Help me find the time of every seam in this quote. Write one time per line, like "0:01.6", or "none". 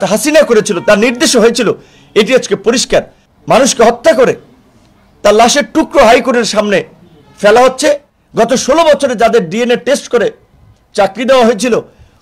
0:03.2
0:08.2